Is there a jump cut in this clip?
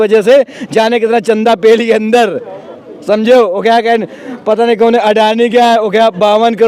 no; 0 cuts

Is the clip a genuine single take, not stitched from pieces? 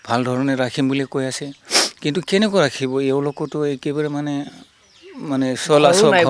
yes; 0 cuts

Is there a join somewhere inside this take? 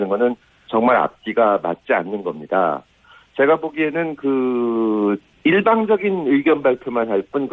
no; 0 cuts

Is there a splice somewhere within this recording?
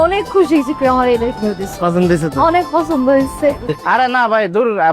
yes; 1 cut; at 3.8 s

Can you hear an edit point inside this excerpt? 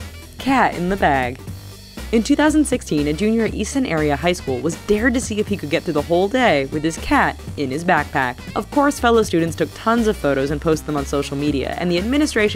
no; 0 cuts

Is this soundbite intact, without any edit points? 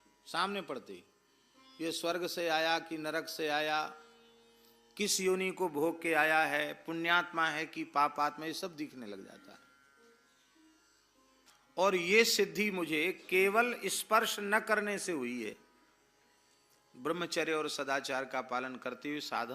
no; 1 cut; at 11.5 s

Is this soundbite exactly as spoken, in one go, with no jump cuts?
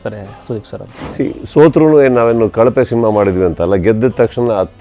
no; 1 cut; at 1.1 s

